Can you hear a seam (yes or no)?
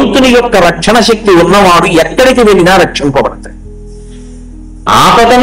no